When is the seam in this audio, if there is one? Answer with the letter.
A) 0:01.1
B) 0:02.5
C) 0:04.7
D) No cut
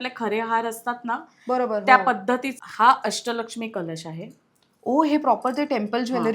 B